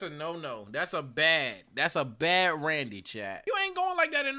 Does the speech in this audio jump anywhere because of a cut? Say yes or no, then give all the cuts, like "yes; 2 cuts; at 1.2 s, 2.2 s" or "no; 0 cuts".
yes; 1 cut; at 3.4 s